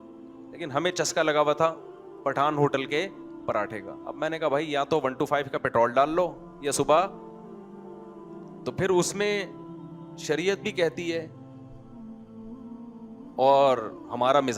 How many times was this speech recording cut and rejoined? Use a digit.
4